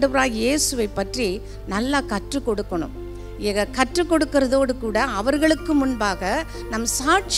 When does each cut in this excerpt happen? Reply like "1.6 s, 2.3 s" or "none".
none